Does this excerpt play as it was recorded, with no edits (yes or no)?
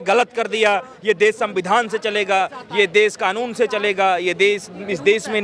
yes